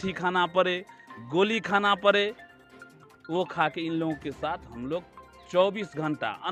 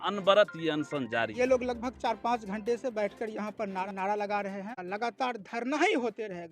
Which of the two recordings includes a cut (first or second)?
second